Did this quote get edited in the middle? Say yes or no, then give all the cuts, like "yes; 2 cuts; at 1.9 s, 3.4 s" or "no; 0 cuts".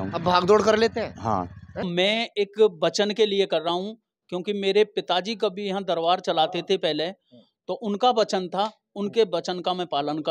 yes; 1 cut; at 1.8 s